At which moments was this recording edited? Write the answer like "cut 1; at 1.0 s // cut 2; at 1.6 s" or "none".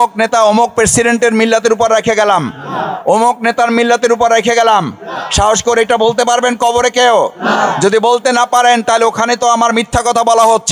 none